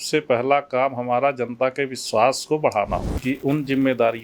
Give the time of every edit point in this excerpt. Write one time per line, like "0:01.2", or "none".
0:03.1